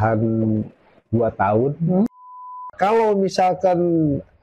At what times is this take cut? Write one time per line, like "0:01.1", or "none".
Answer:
0:02.7